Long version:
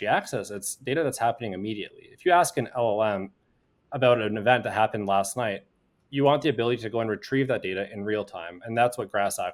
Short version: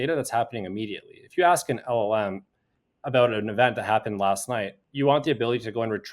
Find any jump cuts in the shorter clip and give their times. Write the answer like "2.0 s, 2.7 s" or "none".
4.8 s